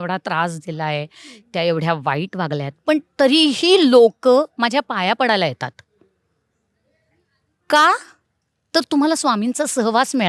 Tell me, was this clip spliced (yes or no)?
no